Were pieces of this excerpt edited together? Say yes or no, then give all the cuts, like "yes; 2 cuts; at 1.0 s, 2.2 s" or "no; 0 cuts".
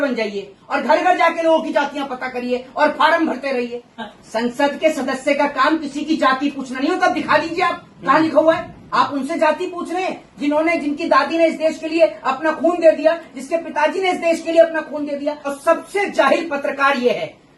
yes; 3 cuts; at 3.9 s, 8.8 s, 15.4 s